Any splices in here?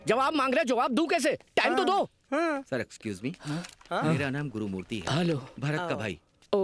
no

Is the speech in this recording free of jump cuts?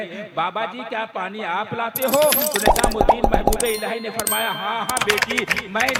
yes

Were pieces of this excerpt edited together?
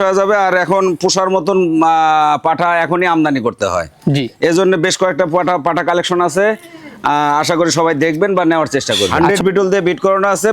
yes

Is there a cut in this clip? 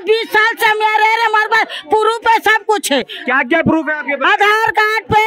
no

